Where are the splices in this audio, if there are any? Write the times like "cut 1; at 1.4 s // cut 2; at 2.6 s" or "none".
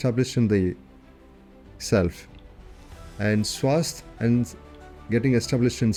none